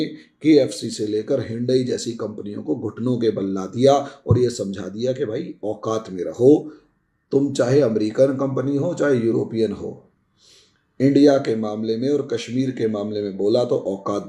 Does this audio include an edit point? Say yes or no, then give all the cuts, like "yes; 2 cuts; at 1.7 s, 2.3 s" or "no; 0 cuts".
no; 0 cuts